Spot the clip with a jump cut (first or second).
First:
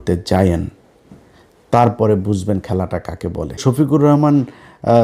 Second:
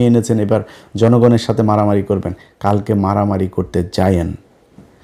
first